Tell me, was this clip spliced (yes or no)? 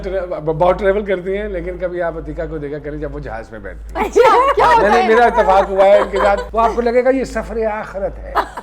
yes